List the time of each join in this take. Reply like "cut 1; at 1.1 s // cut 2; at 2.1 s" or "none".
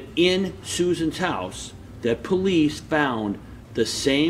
none